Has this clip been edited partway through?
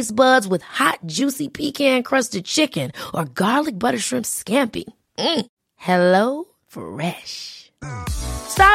no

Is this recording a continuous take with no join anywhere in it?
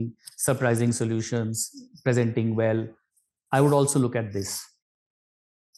yes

